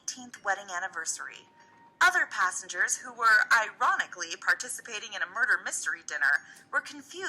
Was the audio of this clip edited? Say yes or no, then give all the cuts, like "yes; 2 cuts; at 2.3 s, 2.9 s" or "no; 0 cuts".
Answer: yes; 1 cut; at 3.4 s